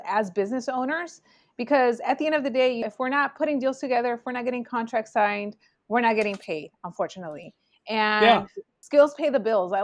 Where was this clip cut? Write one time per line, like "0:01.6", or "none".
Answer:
0:02.8
0:08.8